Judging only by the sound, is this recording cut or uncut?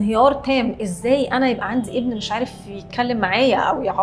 uncut